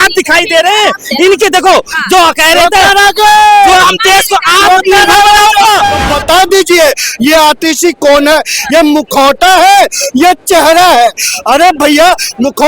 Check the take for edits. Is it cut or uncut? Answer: cut